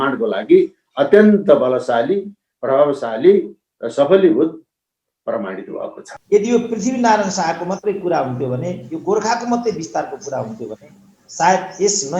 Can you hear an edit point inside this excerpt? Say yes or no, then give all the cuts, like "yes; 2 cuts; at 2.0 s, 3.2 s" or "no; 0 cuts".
yes; 1 cut; at 6.1 s